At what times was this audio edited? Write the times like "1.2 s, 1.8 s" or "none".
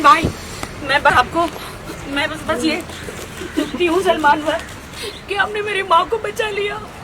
1.1 s